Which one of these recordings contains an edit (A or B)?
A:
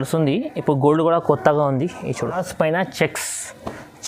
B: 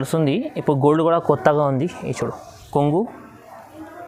A